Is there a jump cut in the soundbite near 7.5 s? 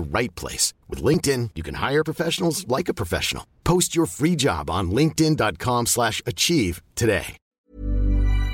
yes; 1 cut; at 7.5 s

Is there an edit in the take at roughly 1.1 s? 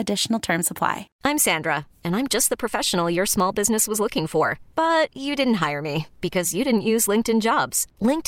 yes; 1 cut; at 1.1 s

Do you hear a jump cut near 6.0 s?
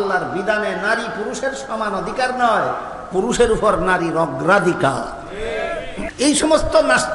yes; 1 cut; at 6.0 s

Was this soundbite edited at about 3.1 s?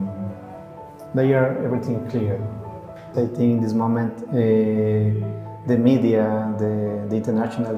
yes; 1 cut; at 3.1 s

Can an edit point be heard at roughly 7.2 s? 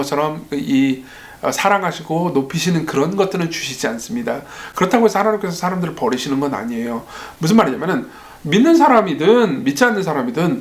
yes; 1 cut; at 7.2 s

